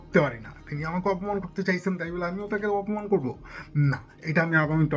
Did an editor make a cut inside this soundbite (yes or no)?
no